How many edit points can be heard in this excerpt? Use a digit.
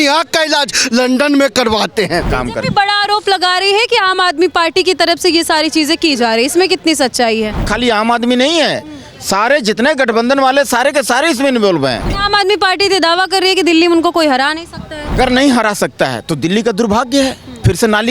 4